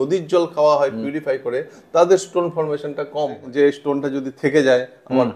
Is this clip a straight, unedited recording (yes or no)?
no